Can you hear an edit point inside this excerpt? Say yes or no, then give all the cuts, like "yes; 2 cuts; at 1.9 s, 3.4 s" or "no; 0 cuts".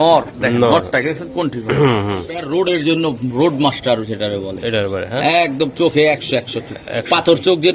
yes; 1 cut; at 2.4 s